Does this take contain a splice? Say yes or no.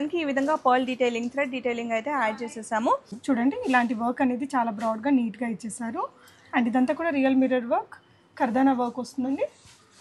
yes